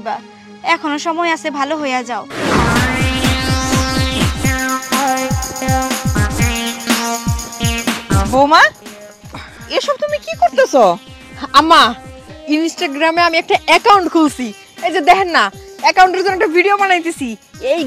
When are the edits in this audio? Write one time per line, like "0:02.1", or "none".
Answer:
0:02.4

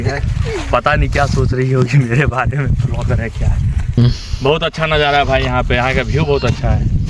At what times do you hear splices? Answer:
0:04.0

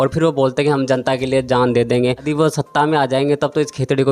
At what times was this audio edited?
0:02.2

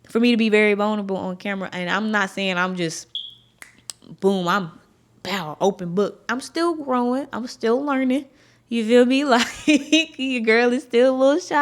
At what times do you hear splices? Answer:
none

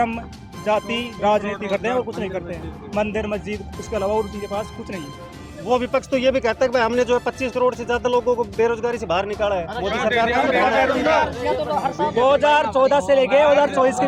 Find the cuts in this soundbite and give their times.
none

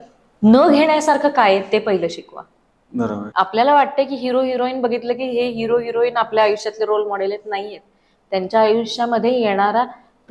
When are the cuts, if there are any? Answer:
0:03.3

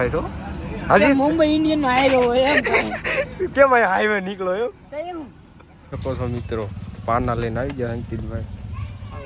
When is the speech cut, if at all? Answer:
0:06.0

